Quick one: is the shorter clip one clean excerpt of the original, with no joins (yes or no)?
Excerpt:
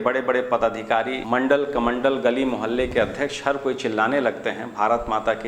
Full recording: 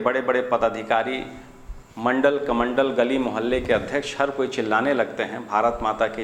no